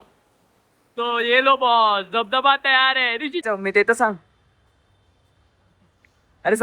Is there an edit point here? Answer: yes; 1 cut; at 3.4 s

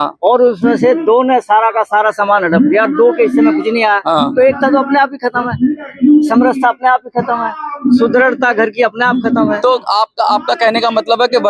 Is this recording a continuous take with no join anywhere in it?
yes; 0 cuts

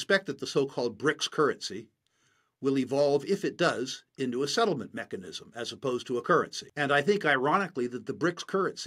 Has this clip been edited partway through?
yes; 1 cut; at 6.6 s

